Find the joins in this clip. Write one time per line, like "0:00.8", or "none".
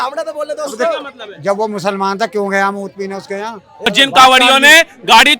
0:03.9